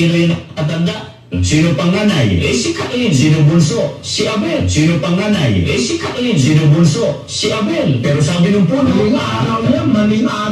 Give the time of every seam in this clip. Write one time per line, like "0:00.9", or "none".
none